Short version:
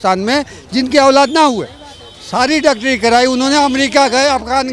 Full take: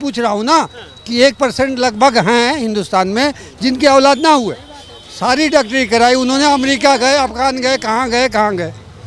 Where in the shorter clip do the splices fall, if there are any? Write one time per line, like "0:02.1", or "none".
none